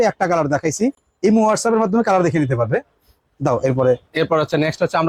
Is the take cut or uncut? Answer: uncut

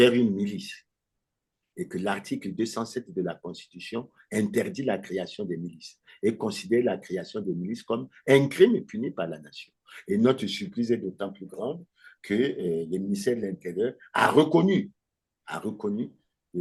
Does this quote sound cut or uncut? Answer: uncut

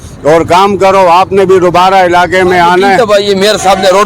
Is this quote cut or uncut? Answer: cut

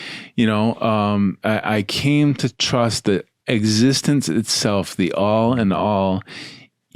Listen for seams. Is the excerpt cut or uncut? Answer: cut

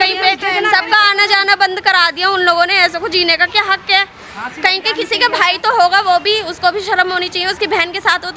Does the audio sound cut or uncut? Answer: uncut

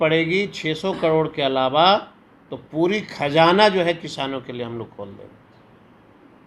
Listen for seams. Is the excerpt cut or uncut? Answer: uncut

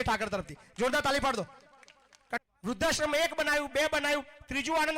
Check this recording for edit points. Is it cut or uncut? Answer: cut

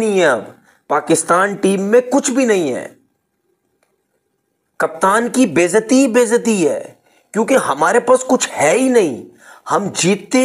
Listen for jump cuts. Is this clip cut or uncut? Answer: uncut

